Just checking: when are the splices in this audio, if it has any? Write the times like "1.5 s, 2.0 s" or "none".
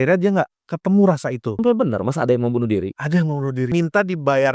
1.6 s, 3.7 s